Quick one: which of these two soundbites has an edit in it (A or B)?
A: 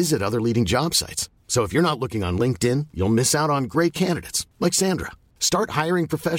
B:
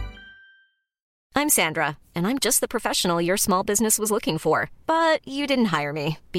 B